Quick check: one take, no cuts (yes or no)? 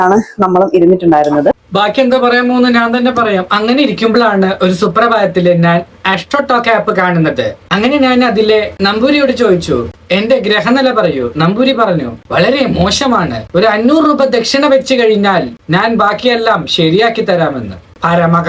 yes